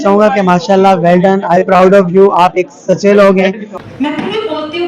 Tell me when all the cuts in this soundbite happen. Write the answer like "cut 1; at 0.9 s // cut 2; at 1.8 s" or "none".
cut 1; at 3.7 s